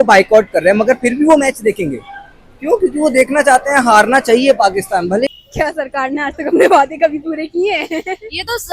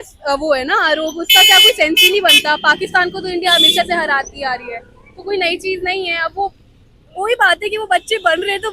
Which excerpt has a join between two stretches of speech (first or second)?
first